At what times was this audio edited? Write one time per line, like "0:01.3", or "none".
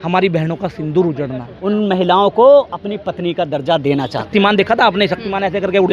0:01.5
0:04.2